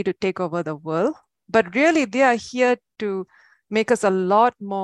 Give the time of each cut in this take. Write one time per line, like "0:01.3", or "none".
none